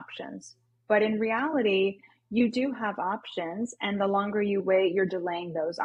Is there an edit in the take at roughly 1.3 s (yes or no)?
no